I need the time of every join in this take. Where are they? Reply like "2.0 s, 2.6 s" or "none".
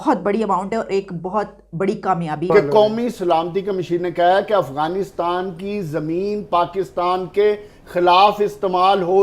2.4 s